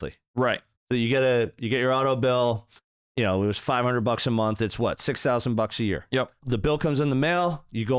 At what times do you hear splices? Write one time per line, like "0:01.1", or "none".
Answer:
0:06.4